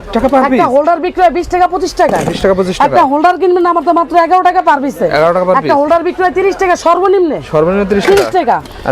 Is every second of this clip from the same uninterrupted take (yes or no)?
yes